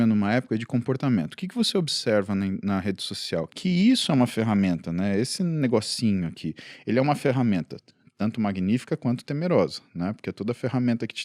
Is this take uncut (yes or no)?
yes